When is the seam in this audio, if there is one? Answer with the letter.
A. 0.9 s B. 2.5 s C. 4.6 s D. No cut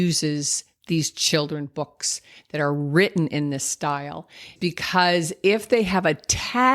C